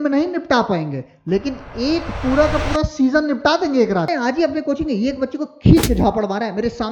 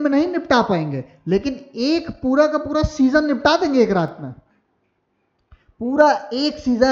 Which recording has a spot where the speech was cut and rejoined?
first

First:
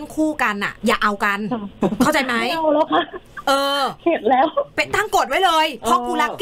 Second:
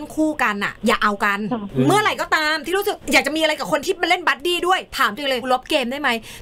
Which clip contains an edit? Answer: second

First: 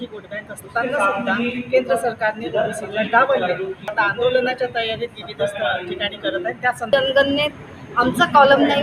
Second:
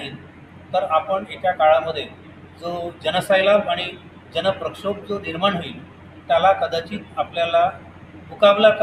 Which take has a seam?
first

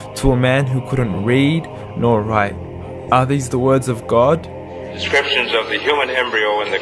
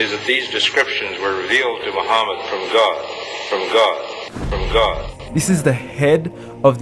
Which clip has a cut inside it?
second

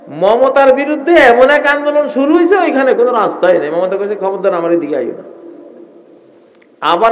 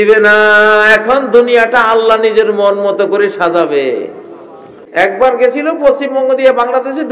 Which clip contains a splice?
second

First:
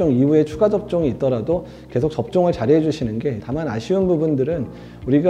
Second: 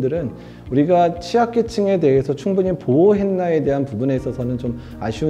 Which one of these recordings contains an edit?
first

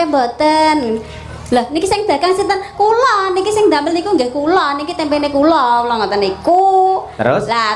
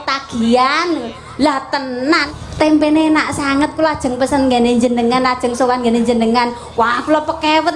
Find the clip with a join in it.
second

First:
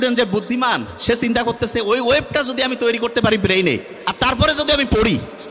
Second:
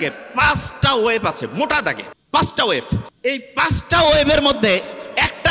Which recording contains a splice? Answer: second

